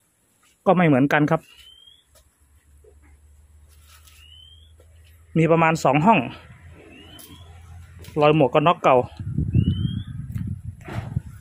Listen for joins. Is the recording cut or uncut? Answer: uncut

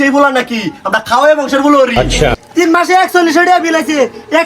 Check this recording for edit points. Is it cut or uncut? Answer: cut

